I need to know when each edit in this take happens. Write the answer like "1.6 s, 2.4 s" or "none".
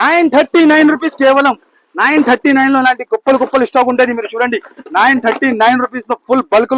none